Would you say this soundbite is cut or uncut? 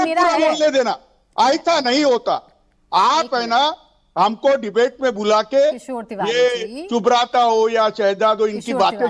uncut